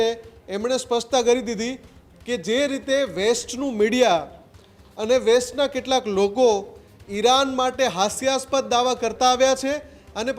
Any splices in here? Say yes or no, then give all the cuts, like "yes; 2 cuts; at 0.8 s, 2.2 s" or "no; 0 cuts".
no; 0 cuts